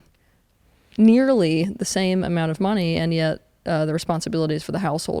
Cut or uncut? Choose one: uncut